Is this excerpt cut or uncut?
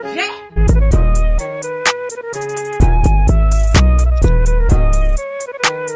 uncut